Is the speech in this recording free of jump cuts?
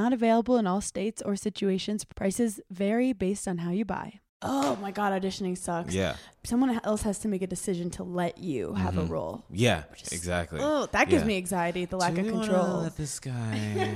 no; 2 cuts; at 4.3 s, 6.3 s

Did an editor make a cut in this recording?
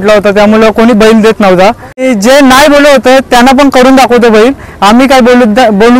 yes; 1 cut; at 2.1 s

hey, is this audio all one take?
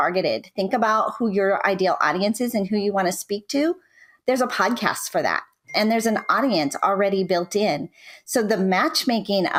yes; 0 cuts

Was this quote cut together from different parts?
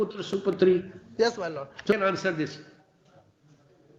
yes; 1 cut; at 1.9 s

